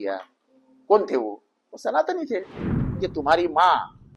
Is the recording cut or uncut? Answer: cut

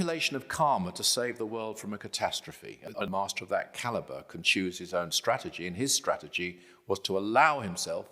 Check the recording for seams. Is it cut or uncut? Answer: cut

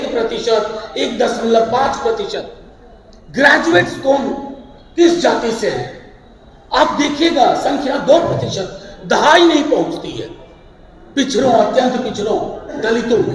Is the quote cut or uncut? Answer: uncut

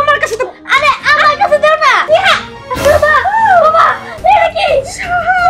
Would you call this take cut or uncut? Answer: cut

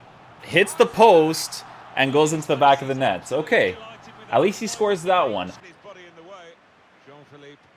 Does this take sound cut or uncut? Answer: cut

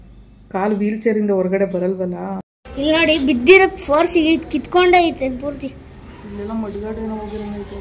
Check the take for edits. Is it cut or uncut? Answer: cut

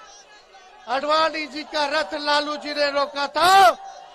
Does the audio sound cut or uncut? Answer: uncut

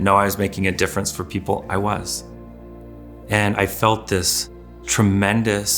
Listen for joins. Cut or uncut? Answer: cut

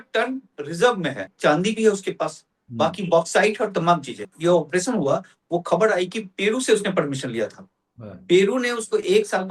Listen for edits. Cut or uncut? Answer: cut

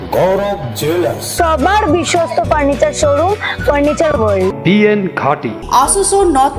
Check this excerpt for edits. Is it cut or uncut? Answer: uncut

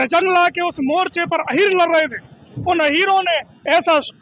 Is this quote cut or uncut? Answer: uncut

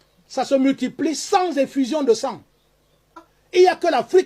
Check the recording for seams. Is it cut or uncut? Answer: cut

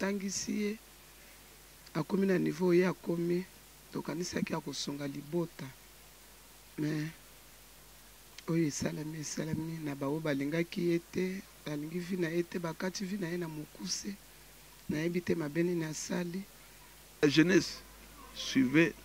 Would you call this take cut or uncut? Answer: cut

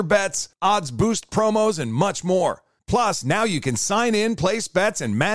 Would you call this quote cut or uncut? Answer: uncut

